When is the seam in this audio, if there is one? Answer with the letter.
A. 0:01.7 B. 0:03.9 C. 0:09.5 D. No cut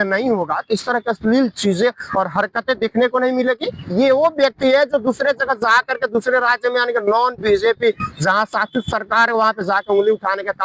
B